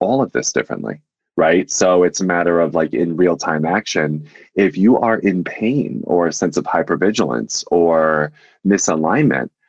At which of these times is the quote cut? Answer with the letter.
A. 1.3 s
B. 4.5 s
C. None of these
A